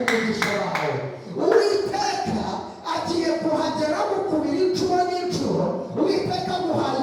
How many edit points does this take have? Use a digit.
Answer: 0